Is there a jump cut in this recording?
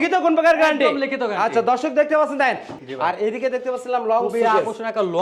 yes; 1 cut; at 2.7 s

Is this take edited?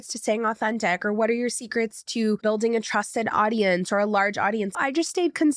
yes; 2 cuts; at 2.4 s, 4.8 s

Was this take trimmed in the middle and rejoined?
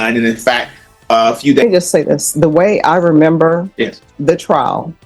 yes; 1 cut; at 1.6 s

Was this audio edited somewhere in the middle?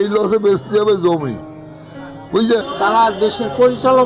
yes; 1 cut; at 2.7 s

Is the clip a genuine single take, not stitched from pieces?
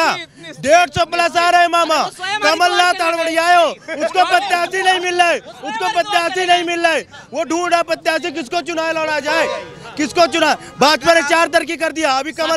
yes; 0 cuts

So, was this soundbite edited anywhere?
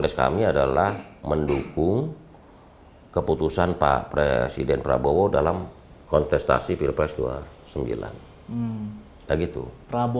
no; 0 cuts

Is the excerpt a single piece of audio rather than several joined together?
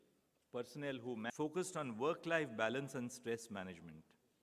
no; 1 cut; at 1.3 s

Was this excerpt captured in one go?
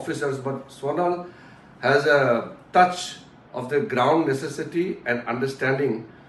yes; 0 cuts

